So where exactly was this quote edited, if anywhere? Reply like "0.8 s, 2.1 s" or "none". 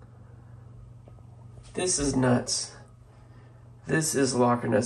none